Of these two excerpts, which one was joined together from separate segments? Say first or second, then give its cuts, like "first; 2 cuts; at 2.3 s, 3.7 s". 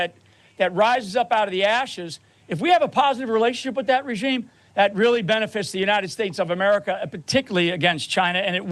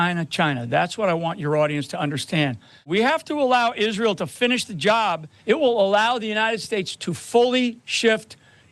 second; 2 cuts; at 2.7 s, 5.3 s